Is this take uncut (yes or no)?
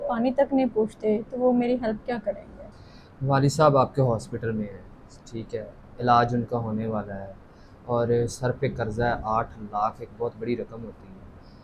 yes